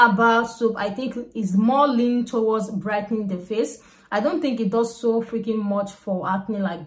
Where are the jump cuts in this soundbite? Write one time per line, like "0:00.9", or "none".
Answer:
none